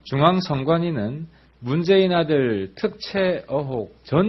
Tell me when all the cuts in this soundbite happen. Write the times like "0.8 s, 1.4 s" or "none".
3.3 s